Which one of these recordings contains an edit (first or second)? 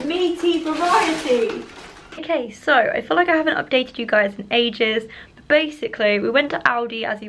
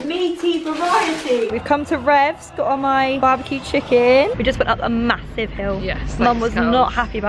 second